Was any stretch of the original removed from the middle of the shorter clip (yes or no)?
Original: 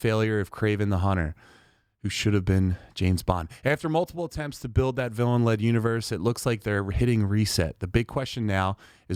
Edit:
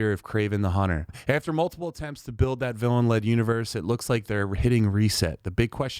yes